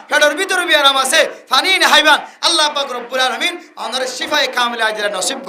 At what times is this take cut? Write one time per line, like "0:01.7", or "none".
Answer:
none